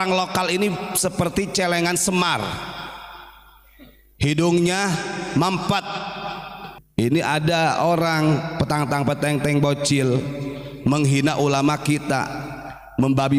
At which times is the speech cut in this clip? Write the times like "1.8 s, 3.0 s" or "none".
6.8 s